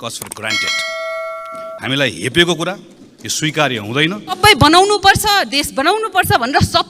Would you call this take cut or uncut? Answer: cut